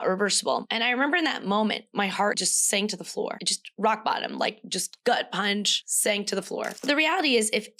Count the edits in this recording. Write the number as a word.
one